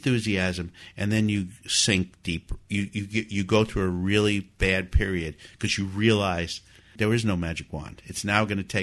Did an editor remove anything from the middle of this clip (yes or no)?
yes